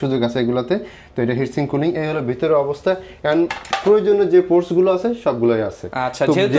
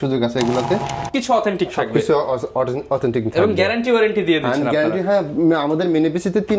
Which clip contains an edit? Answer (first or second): second